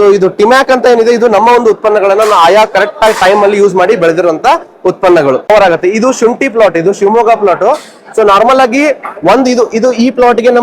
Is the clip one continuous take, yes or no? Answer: no